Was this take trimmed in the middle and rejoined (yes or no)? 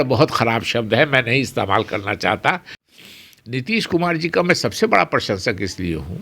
yes